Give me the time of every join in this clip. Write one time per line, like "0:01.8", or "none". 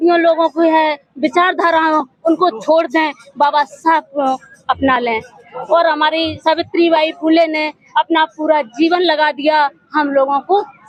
none